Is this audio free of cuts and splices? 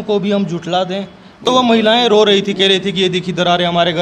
yes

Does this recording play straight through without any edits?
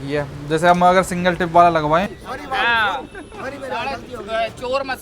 no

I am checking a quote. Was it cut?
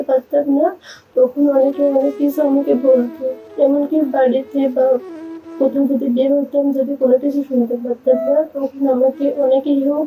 no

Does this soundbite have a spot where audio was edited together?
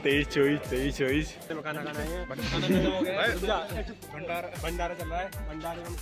yes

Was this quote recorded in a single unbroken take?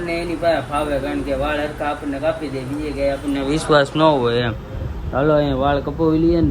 yes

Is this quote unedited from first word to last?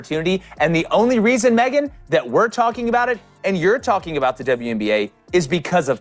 yes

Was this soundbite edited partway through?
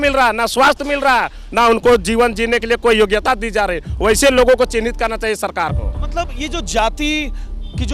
no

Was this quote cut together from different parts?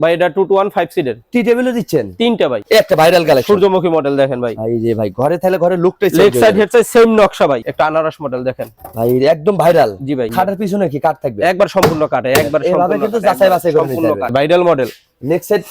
yes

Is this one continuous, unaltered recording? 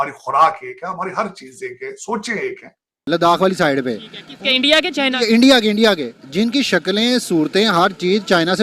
no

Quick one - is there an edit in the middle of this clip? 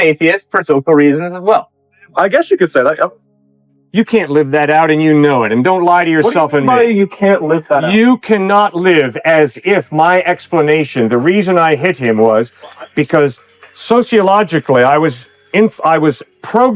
no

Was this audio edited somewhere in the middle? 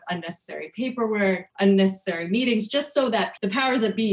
yes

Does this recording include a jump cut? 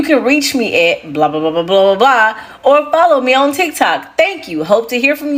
no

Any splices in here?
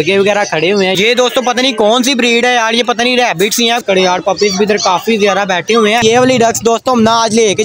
yes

